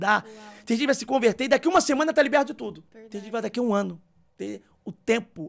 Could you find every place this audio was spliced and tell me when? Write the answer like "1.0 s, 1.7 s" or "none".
none